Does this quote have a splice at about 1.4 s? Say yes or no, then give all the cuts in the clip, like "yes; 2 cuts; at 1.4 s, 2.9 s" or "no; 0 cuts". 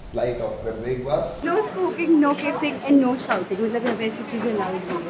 yes; 1 cut; at 1.4 s